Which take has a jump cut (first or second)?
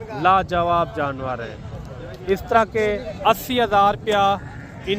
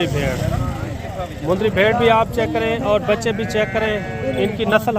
first